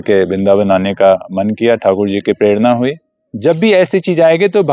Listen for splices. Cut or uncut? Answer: cut